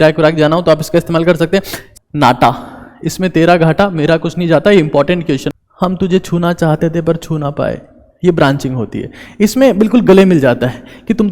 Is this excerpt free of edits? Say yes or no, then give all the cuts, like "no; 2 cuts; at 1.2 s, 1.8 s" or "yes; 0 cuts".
no; 2 cuts; at 1.8 s, 5.5 s